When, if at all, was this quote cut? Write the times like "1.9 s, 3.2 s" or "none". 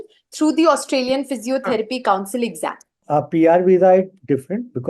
3.0 s